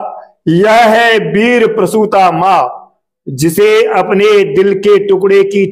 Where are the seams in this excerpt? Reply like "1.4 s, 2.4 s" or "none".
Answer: none